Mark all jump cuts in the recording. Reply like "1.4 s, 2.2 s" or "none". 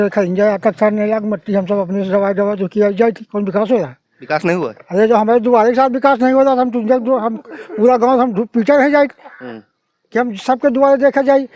none